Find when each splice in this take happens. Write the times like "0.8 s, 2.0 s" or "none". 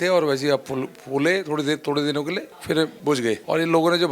3.0 s